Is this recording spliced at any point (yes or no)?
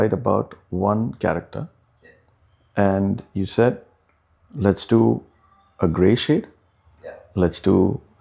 no